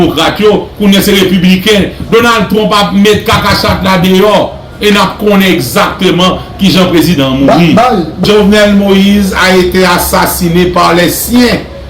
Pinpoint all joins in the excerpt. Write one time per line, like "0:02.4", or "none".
0:08.2

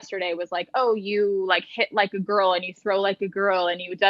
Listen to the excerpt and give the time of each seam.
none

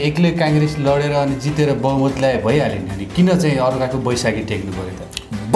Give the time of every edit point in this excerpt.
none

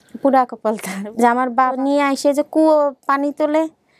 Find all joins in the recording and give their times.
0:01.0
0:01.8

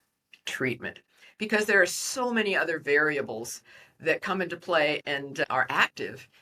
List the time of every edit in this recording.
none

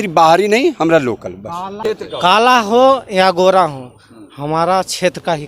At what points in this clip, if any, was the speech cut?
0:01.7

